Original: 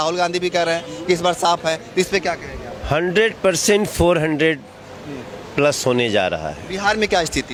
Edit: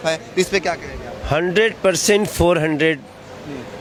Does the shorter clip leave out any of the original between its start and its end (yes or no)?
no